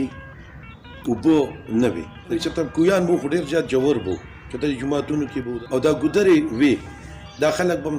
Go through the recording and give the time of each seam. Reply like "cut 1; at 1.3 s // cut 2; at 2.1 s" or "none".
cut 1; at 2.3 s // cut 2; at 5.5 s